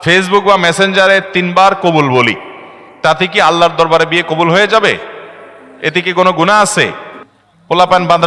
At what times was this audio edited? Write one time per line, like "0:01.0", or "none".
none